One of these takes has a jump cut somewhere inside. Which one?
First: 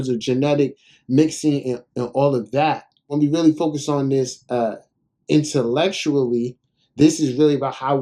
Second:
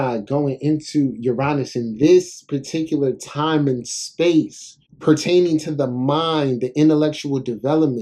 first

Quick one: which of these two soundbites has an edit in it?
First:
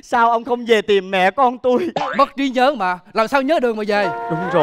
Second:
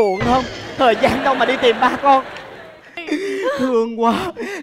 second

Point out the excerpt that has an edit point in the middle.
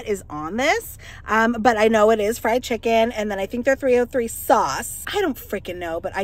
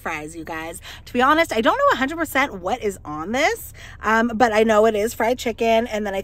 first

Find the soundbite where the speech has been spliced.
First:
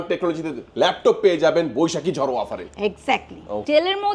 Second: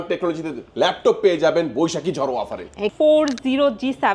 second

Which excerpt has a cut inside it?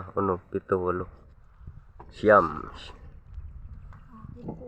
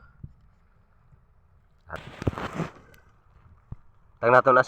second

